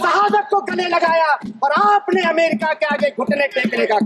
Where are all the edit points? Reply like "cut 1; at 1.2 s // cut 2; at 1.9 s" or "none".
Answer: none